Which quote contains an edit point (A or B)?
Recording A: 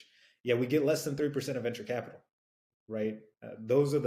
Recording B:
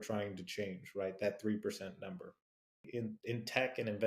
B